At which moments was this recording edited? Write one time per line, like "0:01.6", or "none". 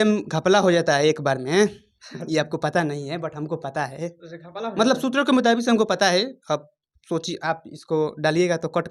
none